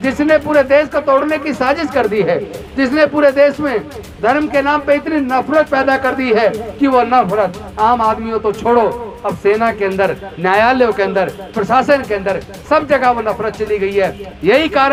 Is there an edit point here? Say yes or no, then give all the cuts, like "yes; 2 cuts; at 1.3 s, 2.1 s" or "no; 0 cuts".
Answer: no; 0 cuts